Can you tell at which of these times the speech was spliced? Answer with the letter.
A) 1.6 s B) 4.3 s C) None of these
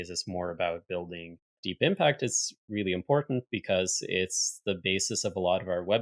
A